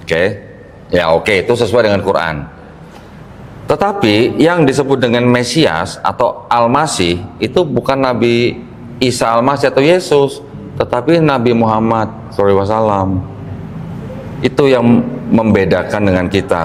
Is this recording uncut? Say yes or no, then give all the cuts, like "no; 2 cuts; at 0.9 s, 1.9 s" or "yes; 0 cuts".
yes; 0 cuts